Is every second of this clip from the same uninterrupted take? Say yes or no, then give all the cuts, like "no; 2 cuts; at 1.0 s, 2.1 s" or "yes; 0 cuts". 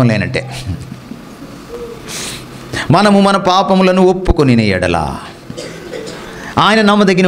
yes; 0 cuts